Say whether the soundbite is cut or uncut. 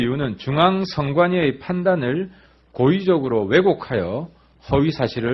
uncut